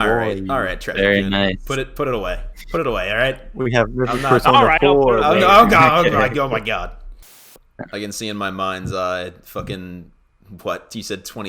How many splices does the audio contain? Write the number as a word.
one